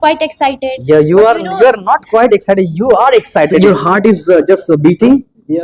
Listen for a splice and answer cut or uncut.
cut